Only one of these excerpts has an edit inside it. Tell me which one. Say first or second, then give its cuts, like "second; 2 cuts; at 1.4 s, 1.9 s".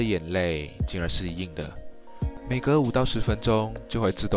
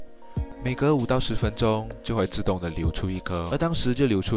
second; 1 cut; at 3.5 s